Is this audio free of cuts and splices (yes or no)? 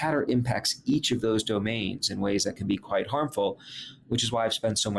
no